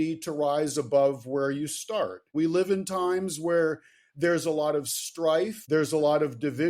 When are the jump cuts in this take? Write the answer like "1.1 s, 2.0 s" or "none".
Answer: 2.2 s, 5.6 s